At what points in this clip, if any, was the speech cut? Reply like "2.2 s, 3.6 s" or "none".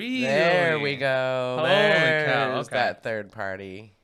none